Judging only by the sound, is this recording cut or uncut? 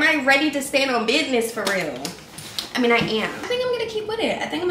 cut